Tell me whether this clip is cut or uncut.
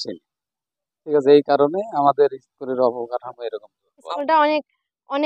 cut